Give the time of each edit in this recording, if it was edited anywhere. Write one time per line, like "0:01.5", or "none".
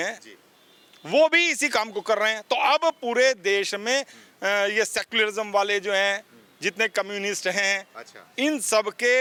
none